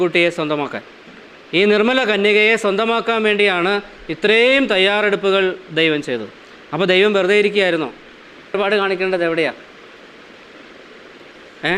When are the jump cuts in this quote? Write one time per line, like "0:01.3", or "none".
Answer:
0:08.5